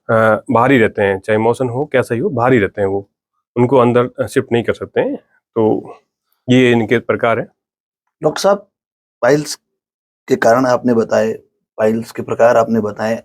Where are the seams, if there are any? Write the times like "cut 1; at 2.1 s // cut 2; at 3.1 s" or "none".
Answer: none